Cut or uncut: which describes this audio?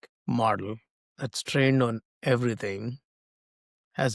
uncut